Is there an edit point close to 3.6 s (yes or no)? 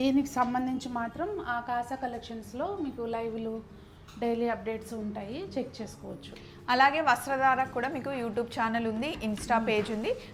no